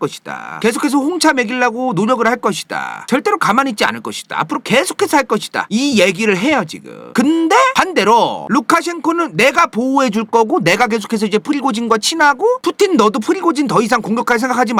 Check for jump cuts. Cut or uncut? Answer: uncut